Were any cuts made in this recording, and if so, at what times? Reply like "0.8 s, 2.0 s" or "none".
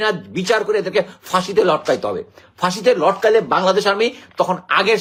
none